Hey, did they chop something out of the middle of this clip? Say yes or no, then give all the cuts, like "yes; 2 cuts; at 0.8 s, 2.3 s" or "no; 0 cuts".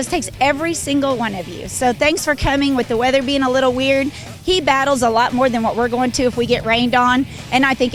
no; 0 cuts